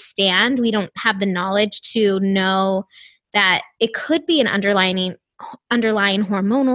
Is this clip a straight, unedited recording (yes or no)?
yes